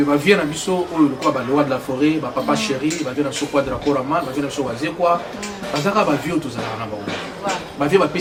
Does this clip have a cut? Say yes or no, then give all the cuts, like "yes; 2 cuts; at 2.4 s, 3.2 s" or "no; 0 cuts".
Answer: no; 0 cuts